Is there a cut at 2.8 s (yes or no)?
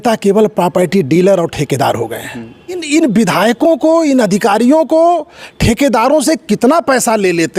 yes